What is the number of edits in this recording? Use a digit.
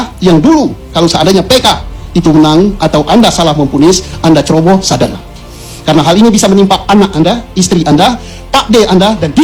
0